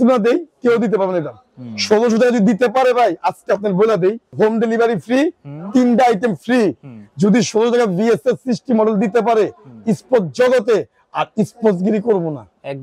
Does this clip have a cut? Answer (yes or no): yes